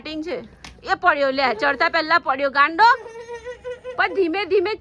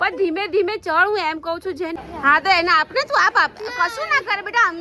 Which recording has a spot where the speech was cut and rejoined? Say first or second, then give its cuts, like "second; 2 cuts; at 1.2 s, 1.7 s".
second; 1 cut; at 1.9 s